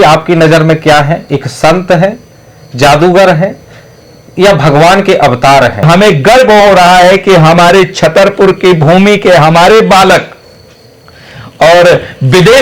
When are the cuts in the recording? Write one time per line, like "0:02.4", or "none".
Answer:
0:05.9